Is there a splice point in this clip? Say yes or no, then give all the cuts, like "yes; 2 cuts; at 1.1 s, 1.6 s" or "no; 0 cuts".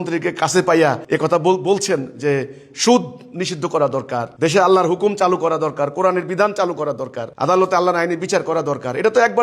yes; 2 cuts; at 1.0 s, 4.3 s